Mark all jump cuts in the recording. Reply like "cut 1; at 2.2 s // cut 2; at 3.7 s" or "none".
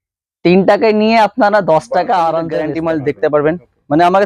cut 1; at 2.7 s